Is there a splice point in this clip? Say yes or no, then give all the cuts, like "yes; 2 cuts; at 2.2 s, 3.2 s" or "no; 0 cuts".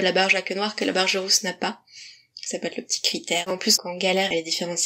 yes; 1 cut; at 3.5 s